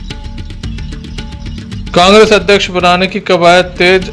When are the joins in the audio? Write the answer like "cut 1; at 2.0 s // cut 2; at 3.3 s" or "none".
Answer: cut 1; at 0.7 s // cut 2; at 1.9 s